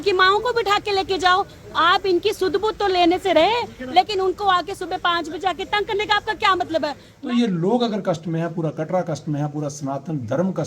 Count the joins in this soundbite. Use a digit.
1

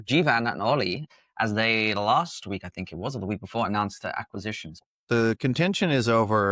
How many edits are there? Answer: 2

